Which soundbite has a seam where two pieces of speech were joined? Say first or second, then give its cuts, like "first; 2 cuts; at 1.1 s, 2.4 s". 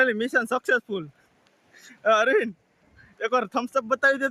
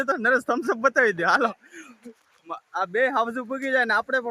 second; 1 cut; at 1.0 s